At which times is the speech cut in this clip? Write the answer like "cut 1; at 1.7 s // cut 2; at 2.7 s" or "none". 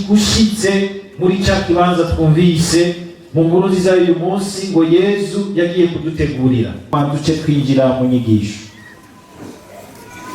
cut 1; at 6.9 s

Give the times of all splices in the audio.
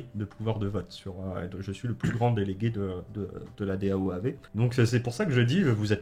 cut 1; at 4.4 s

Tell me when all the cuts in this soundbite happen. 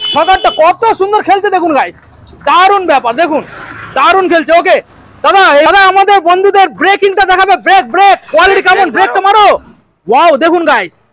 cut 1; at 5.7 s

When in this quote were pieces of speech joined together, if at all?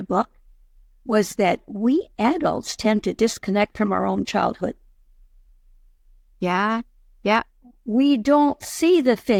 none

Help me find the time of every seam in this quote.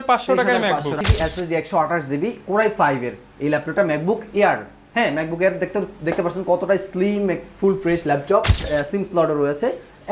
cut 1; at 1.0 s // cut 2; at 8.7 s

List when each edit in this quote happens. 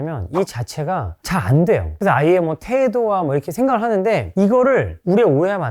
cut 1; at 1.9 s

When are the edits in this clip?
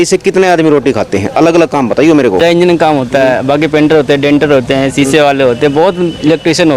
cut 1; at 2.4 s

